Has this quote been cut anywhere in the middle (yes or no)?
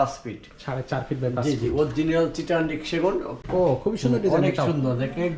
yes